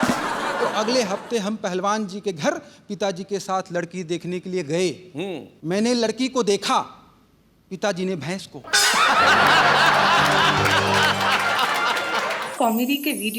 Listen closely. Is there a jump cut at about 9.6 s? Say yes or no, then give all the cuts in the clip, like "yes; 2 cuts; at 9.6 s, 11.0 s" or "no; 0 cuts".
no; 1 cut; at 12.4 s